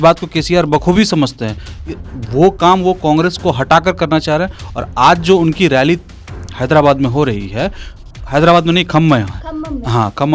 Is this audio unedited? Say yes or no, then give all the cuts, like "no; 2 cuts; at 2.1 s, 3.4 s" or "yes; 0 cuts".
yes; 0 cuts